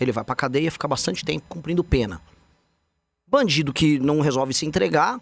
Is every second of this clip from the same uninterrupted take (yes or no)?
yes